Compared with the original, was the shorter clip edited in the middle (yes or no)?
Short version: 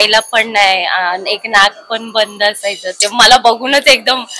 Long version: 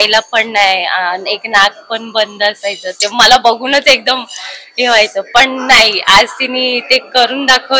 no